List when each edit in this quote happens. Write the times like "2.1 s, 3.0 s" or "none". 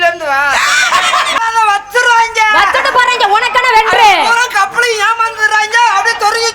1.4 s

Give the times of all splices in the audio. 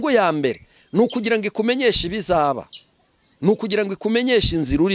none

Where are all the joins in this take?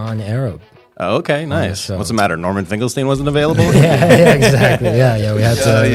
none

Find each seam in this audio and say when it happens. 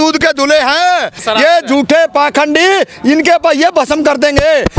1.2 s

